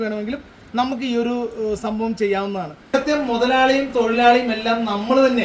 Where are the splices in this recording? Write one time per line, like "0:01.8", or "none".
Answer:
0:02.9